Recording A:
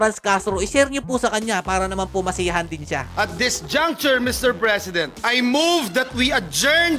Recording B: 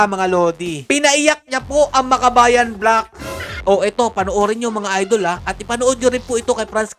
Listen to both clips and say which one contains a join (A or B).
B